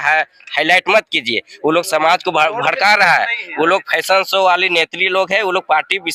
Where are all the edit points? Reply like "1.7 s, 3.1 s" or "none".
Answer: none